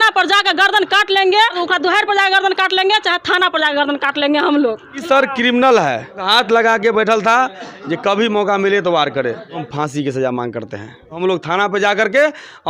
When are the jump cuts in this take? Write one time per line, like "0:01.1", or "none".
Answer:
0:01.6
0:05.0
0:06.2
0:09.7
0:11.2